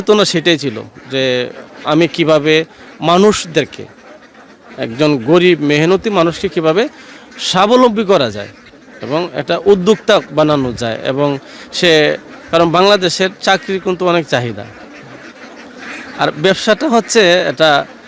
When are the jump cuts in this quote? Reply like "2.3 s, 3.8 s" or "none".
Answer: none